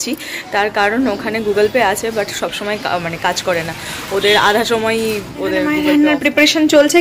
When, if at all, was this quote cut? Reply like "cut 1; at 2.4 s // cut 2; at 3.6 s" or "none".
cut 1; at 5.8 s